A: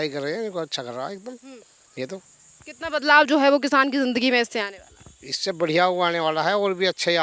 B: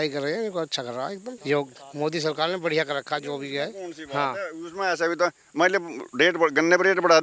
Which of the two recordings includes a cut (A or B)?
B